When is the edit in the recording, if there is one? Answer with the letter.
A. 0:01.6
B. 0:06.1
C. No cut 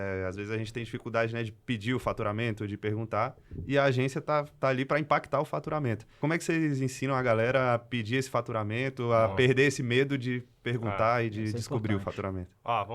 B